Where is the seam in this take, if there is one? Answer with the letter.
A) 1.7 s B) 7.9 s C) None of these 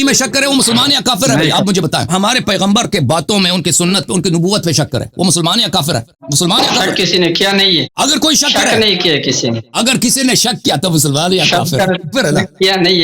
B